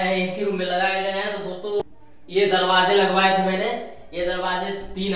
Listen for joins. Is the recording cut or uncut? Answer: cut